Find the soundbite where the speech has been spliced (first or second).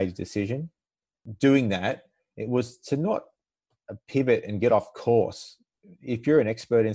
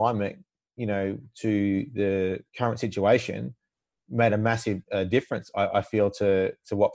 first